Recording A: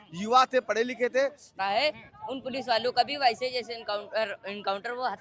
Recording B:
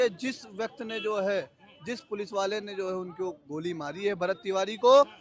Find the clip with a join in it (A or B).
A